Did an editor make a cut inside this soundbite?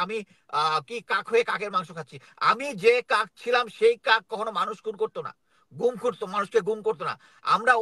no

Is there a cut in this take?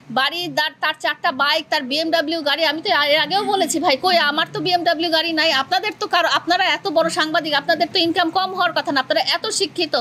no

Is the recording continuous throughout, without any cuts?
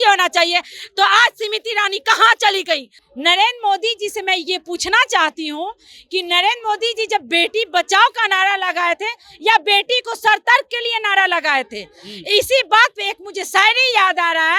no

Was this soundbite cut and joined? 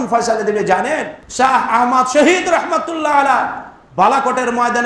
yes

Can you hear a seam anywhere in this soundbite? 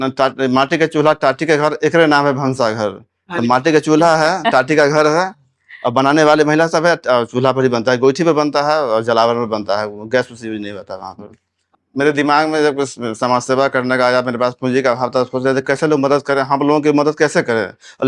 yes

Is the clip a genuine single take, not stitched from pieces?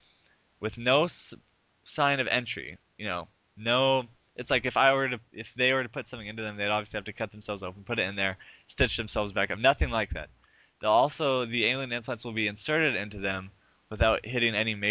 no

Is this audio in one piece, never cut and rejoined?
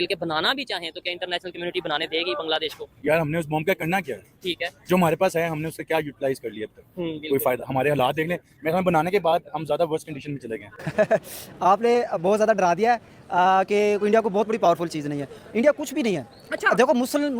no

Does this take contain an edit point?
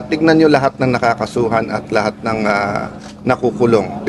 no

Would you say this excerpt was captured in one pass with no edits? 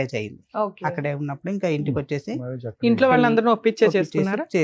yes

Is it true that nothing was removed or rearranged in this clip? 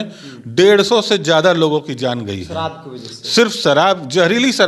yes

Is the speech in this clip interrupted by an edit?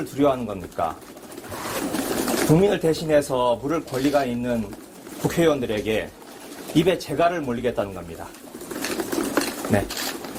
no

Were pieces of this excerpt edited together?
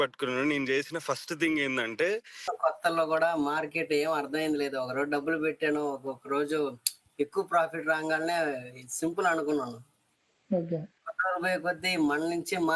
yes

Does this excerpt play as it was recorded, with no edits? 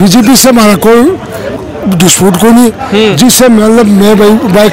yes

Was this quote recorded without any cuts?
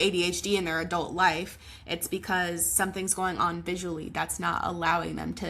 yes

